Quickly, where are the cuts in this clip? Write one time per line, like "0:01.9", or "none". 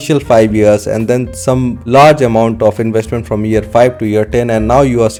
none